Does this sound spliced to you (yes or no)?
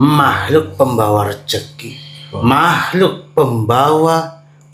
no